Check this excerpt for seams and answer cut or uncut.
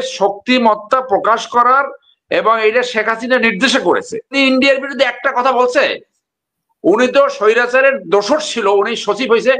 cut